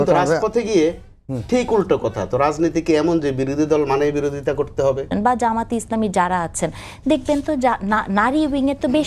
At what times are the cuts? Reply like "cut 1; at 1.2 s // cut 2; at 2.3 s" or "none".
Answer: cut 1; at 5.1 s